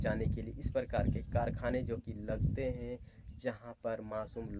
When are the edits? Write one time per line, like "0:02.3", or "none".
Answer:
none